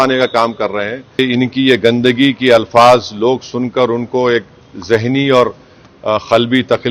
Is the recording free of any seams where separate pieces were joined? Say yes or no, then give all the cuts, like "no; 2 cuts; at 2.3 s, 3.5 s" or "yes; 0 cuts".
no; 1 cut; at 1.2 s